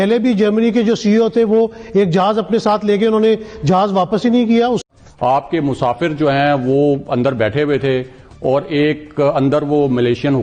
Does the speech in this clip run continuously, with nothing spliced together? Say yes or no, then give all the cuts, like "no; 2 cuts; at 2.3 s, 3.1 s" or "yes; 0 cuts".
no; 1 cut; at 4.8 s